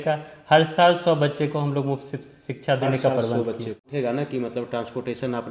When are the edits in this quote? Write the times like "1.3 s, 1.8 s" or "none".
3.9 s